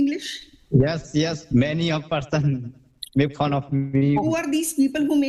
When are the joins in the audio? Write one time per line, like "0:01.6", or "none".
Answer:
0:01.4
0:04.2